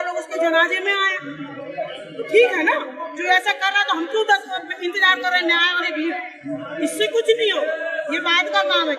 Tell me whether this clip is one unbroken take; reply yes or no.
yes